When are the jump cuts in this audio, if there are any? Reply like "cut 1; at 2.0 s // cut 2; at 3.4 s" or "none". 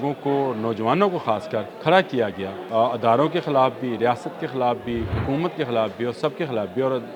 cut 1; at 1.7 s // cut 2; at 2.5 s // cut 3; at 5.1 s